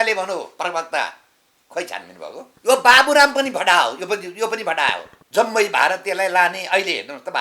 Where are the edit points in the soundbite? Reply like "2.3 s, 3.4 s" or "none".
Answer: 2.5 s, 5.1 s